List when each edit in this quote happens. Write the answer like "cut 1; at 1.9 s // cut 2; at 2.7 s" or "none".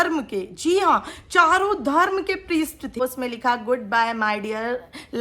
cut 1; at 3.0 s